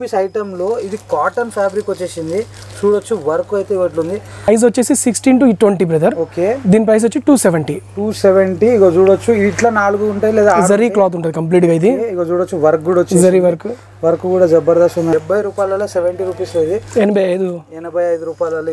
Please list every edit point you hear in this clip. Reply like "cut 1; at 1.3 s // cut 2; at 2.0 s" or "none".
cut 1; at 4.5 s // cut 2; at 15.1 s